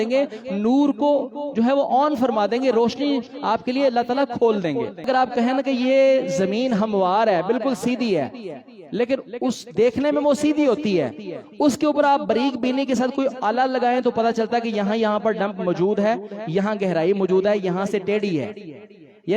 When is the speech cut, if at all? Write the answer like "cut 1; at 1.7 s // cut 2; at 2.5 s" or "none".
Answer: cut 1; at 5.0 s